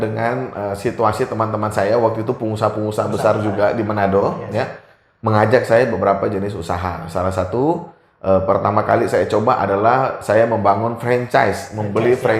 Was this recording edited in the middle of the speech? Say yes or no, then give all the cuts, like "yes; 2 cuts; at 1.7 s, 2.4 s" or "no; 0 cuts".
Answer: no; 0 cuts